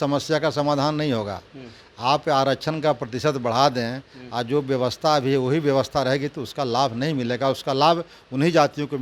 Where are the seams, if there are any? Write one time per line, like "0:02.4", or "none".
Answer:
none

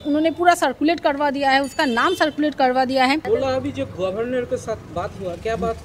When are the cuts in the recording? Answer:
0:03.2

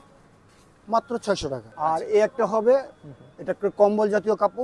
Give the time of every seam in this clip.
0:01.7

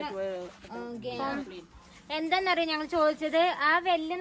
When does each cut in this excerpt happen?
0:01.2

